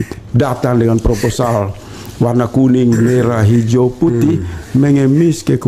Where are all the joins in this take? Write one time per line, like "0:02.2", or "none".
none